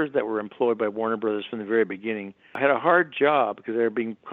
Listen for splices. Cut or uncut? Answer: cut